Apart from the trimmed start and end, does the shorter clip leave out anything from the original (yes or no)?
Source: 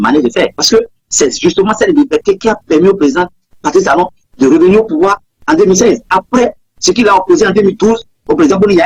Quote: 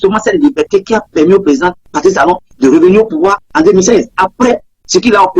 yes